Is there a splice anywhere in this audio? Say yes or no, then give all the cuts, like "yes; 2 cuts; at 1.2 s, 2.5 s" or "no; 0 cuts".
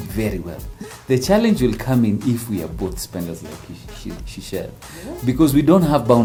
no; 0 cuts